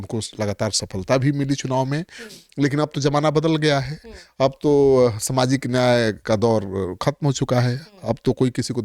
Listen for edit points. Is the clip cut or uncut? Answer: uncut